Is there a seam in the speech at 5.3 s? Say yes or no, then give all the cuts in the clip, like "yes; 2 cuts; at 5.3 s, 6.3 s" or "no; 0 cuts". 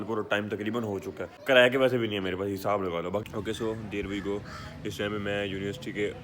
no; 2 cuts; at 1.3 s, 3.2 s